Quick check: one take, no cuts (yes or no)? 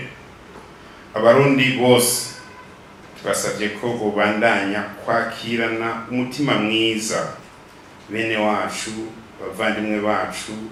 yes